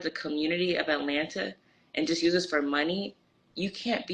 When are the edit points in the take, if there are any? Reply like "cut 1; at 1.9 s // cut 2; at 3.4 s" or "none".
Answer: none